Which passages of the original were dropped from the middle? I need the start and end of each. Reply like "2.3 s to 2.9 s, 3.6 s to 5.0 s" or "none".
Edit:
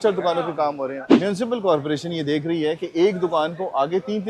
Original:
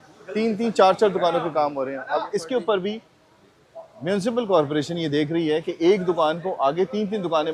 2.0 s to 3.9 s